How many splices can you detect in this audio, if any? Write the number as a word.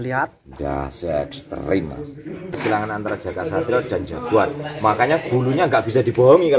one